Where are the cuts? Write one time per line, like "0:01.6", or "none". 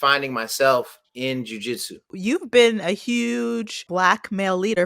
0:02.1
0:03.8